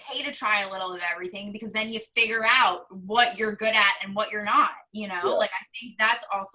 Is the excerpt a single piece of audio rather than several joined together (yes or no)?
yes